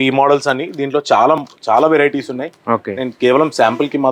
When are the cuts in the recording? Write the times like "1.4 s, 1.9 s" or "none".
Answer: none